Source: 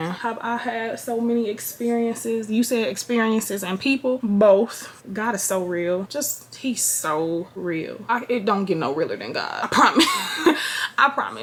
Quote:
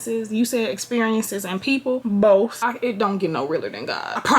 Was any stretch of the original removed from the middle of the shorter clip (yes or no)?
yes